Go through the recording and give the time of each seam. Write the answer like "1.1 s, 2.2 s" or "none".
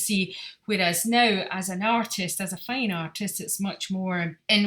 none